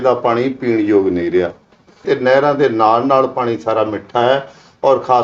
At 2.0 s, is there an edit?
yes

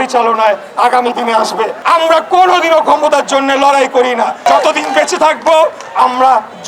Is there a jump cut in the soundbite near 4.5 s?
yes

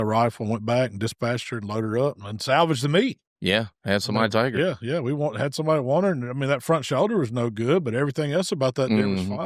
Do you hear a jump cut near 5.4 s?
no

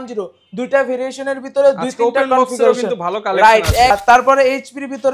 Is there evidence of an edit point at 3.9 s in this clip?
yes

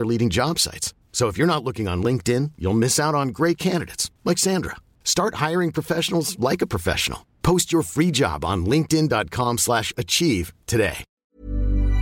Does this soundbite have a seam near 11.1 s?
yes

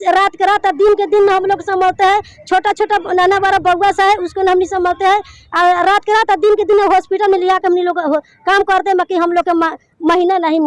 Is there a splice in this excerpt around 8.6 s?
no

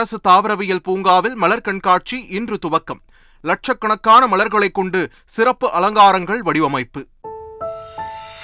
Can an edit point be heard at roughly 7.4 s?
yes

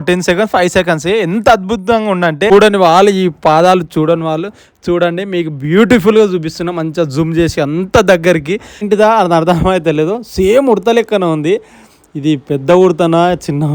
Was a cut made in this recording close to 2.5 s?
yes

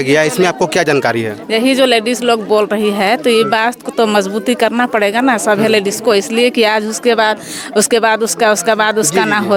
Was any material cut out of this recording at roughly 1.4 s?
no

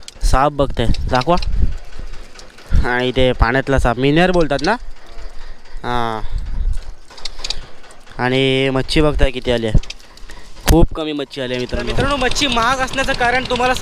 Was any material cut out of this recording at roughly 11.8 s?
yes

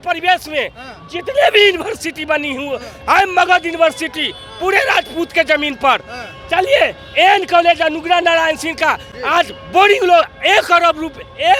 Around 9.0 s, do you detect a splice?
no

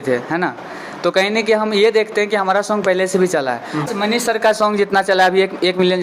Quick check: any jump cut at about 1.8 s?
no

